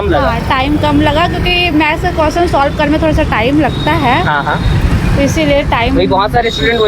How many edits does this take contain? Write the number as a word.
zero